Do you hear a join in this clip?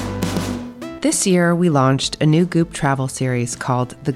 yes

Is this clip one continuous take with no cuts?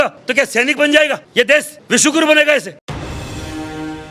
yes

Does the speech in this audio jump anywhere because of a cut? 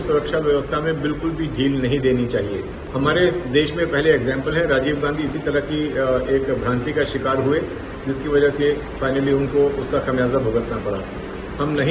yes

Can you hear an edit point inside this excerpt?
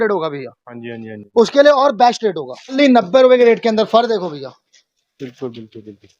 yes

